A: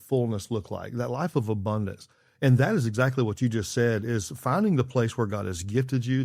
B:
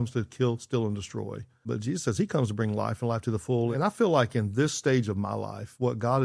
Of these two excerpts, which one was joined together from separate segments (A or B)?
B